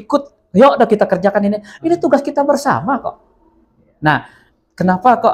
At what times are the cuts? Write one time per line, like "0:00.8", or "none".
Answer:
none